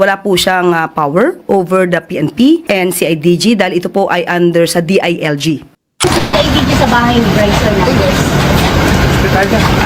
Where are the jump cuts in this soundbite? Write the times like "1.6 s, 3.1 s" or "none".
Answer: 5.7 s